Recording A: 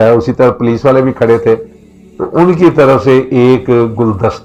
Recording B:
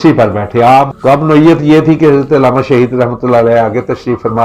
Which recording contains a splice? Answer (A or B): B